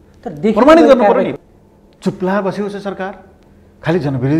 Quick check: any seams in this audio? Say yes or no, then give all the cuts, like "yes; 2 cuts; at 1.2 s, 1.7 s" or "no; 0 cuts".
yes; 1 cut; at 1.3 s